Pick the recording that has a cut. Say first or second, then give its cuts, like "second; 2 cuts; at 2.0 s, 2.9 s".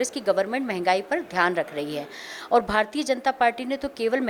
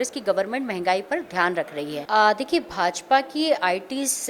second; 1 cut; at 2.0 s